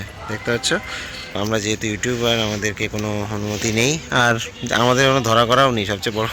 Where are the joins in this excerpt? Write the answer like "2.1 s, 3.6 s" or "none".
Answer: 1.3 s

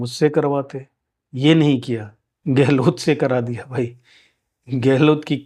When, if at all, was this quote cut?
none

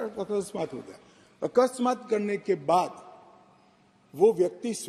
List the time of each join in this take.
none

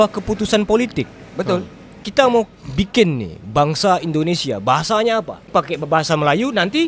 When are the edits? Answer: none

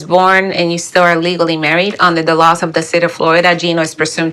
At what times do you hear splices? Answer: none

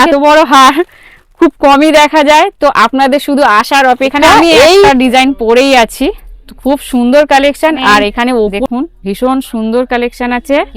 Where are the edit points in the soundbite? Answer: 4.9 s, 8.6 s

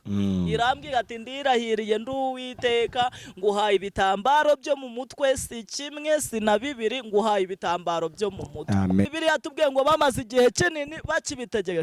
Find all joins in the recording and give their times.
9.1 s

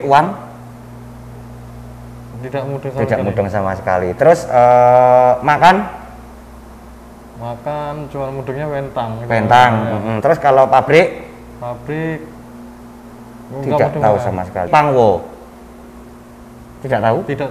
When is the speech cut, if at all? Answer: 14.7 s

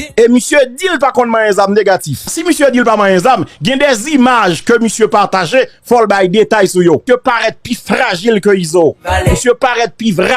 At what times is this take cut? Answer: 2.2 s, 7.0 s

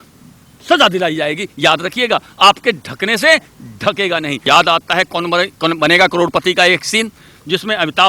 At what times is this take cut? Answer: 4.5 s

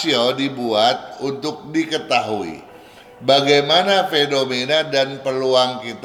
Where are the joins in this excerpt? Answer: none

